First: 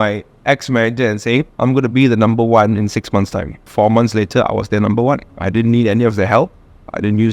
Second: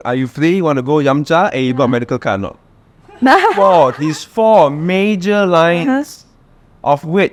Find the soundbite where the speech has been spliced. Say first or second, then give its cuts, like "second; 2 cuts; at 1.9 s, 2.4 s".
first; 3 cuts; at 1.5 s, 3.7 s, 5.3 s